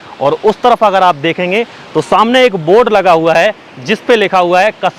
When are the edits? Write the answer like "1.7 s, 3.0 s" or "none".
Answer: none